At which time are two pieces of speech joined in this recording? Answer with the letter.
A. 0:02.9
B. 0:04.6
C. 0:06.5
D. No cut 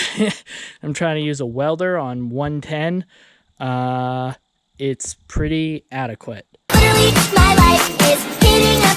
C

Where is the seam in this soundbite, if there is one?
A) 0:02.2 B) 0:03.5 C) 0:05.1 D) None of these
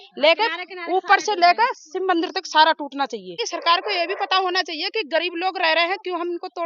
B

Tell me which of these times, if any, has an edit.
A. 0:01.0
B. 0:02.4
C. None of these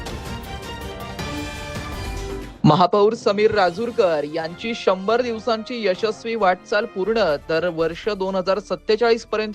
B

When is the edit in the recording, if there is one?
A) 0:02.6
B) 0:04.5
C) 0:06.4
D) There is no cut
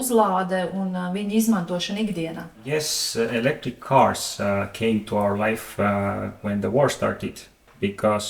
D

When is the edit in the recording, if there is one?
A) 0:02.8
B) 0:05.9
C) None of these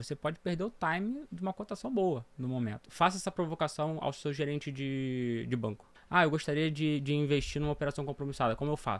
A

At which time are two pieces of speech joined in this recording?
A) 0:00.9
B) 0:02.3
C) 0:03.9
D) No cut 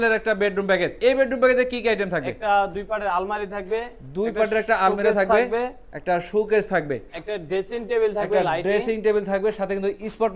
A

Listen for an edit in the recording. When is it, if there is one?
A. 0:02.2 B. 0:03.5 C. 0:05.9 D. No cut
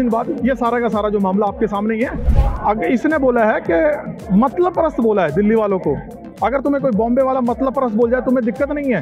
A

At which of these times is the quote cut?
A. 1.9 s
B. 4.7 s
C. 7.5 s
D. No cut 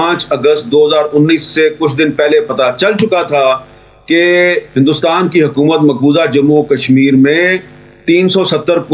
D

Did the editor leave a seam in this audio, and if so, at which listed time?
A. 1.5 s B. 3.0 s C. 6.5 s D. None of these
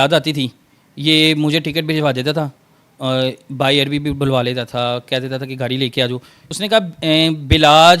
C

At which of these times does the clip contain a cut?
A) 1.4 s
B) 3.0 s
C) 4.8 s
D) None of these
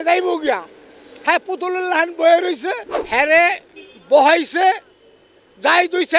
B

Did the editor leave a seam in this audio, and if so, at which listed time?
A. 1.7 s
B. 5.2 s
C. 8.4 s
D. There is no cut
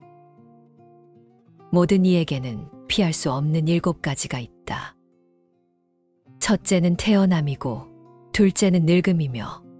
A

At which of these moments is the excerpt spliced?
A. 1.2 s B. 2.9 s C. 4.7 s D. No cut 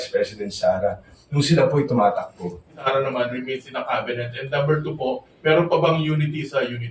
B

